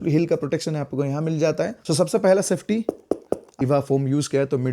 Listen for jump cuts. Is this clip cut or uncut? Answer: cut